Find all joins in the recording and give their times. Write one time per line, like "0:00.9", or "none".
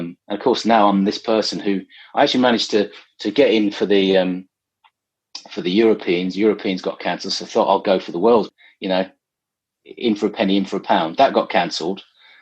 0:08.5